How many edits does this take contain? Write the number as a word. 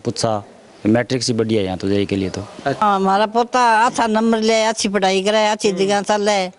one